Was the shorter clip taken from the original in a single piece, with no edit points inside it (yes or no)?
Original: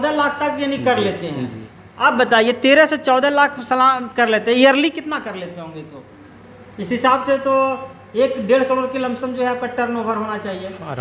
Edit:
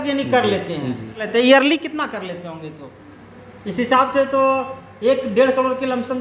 no